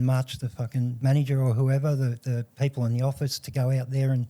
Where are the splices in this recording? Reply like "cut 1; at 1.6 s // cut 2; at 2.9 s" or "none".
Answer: cut 1; at 0.9 s // cut 2; at 2.5 s